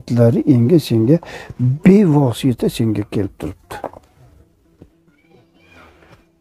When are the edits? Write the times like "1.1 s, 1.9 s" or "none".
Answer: none